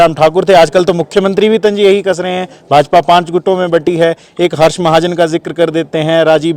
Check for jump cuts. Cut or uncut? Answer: uncut